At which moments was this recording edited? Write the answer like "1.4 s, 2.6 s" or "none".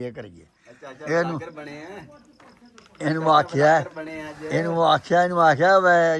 none